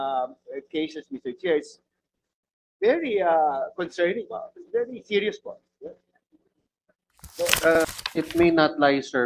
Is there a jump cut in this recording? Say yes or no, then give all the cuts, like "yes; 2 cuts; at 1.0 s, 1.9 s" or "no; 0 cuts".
yes; 1 cut; at 7.8 s